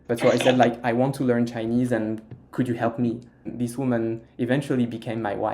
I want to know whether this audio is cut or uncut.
cut